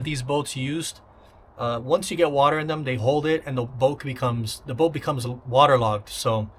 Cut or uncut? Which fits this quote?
uncut